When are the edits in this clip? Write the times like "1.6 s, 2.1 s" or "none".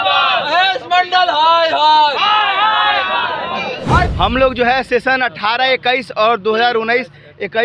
4.1 s